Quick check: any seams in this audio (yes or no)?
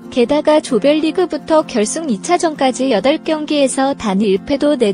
no